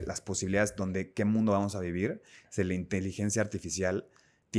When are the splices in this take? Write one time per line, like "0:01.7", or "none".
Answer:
none